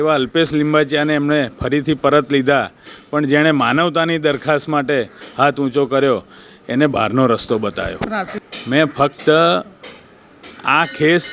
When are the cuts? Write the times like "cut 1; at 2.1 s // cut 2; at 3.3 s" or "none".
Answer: cut 1; at 8.4 s